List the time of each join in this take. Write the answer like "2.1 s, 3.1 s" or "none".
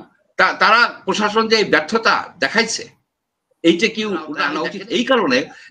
4.7 s